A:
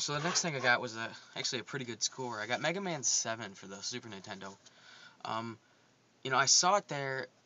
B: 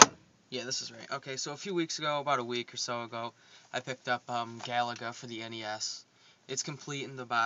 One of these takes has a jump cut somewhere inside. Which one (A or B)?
B